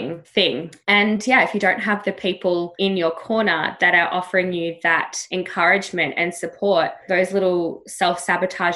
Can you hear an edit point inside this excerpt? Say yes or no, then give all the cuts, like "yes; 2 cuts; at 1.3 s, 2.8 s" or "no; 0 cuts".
yes; 2 cuts; at 2.7 s, 5.2 s